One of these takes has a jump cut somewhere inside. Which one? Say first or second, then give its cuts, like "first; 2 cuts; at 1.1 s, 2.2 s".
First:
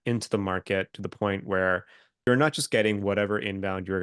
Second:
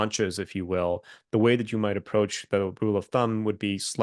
first; 1 cut; at 2.3 s